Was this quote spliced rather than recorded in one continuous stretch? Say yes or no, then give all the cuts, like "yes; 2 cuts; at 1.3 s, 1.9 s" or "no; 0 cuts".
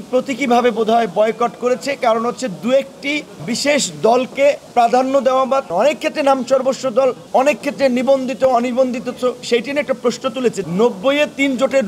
yes; 5 cuts; at 3.3 s, 4.6 s, 5.7 s, 7.2 s, 10.6 s